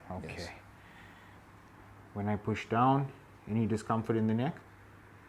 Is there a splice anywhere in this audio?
no; 0 cuts

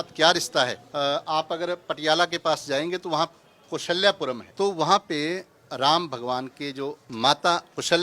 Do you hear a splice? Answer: yes; 3 cuts; at 0.8 s, 4.5 s, 7.0 s

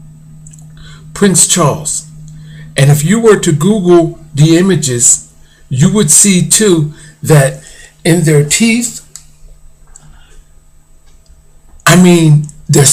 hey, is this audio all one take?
no; 1 cut; at 8.2 s

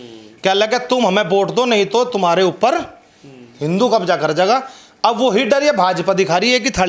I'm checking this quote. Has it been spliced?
no; 0 cuts

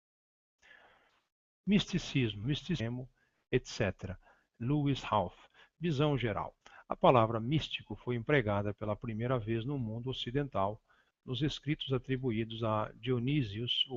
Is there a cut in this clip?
no; 0 cuts

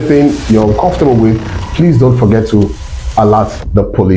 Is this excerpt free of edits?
yes; 0 cuts

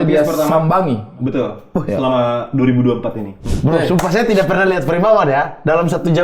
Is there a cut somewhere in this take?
yes; 1 cut; at 3.5 s

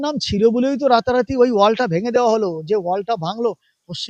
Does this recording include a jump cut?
no; 0 cuts

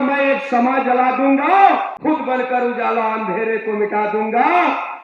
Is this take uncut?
no; 1 cut; at 1.9 s

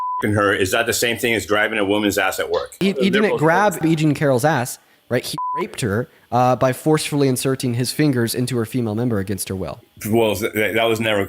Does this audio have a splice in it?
yes; 3 cuts; at 2.8 s, 3.8 s, 9.9 s

